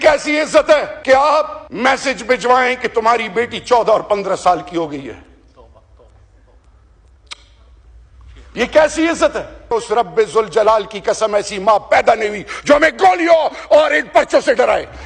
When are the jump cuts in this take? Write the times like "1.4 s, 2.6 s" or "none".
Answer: 0.9 s, 1.6 s, 9.7 s